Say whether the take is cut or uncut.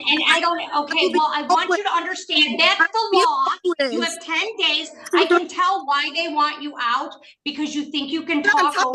uncut